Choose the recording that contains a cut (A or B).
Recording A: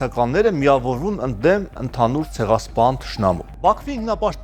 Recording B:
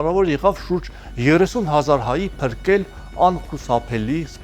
A